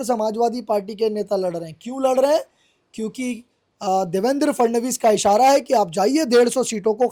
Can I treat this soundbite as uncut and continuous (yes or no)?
yes